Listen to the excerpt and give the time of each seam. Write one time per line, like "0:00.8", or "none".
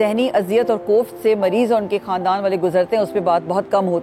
none